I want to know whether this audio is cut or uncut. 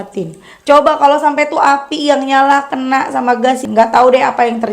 cut